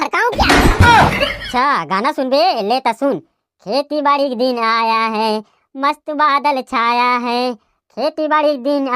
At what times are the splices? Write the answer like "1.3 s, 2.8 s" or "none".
1.4 s